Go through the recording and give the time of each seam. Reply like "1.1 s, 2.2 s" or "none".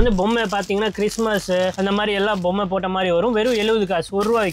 none